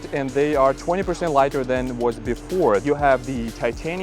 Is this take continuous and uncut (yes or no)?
no